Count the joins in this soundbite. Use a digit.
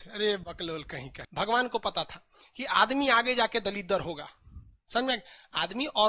1